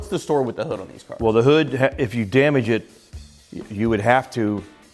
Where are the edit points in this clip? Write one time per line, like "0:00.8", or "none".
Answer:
none